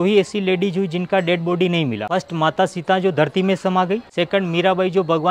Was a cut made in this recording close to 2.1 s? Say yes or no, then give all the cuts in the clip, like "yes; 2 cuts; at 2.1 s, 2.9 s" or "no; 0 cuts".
yes; 2 cuts; at 2.1 s, 4.1 s